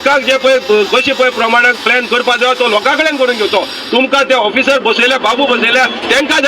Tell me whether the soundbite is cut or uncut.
uncut